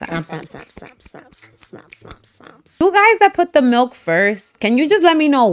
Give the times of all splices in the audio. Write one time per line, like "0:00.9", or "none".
0:02.8

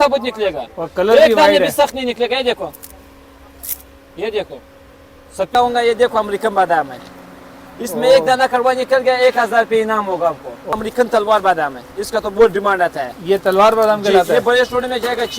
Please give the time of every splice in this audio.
0:05.5
0:10.7

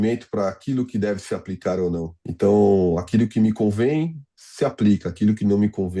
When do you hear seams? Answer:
0:02.2

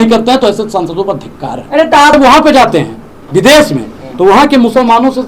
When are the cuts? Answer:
0:02.1

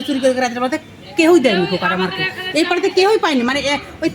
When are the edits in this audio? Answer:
none

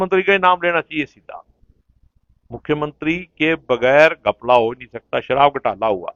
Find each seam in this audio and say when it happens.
none

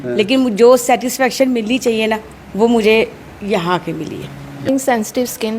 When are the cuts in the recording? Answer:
0:04.7

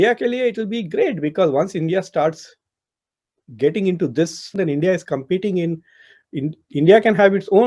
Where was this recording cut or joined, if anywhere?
none

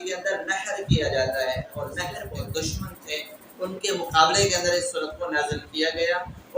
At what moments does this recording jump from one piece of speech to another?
0:02.1

